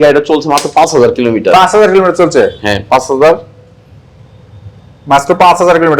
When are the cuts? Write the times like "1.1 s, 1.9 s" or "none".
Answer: none